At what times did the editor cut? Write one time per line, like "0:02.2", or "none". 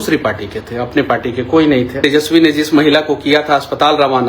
0:02.0